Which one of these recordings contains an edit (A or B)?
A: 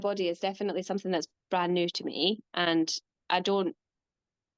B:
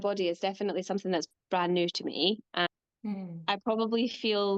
B